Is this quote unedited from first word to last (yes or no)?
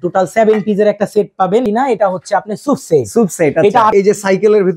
no